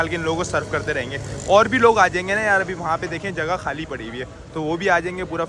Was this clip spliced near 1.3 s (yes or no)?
no